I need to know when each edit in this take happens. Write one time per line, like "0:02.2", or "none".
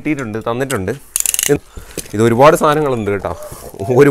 0:01.6